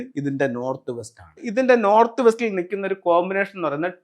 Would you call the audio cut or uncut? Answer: cut